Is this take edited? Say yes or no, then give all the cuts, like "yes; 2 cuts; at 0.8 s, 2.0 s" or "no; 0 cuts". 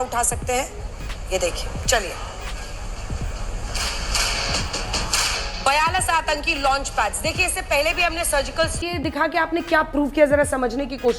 yes; 1 cut; at 8.8 s